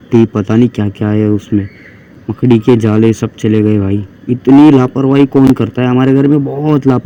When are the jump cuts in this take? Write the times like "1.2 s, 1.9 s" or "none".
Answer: none

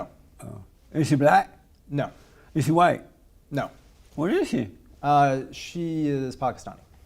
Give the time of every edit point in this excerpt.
4.9 s

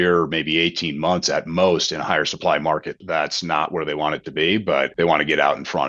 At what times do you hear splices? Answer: 2.9 s, 4.9 s

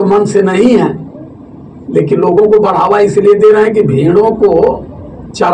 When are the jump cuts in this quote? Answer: none

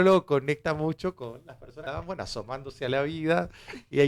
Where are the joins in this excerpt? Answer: 1.7 s

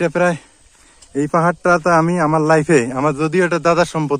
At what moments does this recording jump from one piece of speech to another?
none

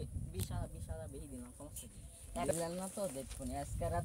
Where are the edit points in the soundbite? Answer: 2.5 s

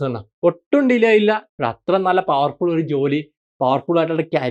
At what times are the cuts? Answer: 1.5 s

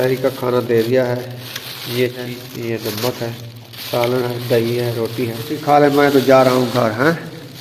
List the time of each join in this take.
2.3 s, 5.6 s

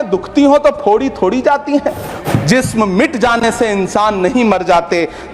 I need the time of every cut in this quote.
2.2 s

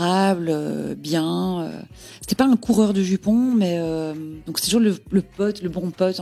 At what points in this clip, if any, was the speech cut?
4.4 s

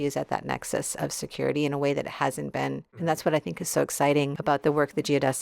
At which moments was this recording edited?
3.0 s, 4.4 s

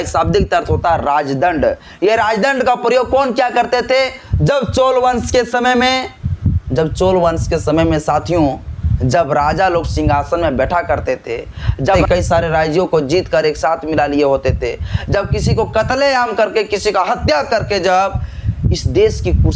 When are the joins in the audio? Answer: 12.0 s

